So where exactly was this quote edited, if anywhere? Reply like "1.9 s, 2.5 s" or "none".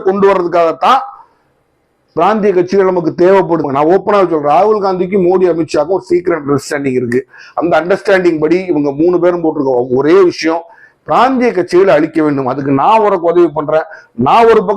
3.6 s